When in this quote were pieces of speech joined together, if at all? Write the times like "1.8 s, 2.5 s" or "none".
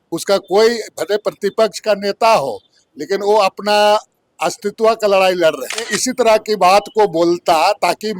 6.0 s